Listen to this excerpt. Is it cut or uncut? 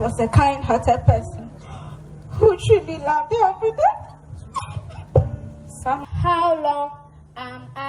cut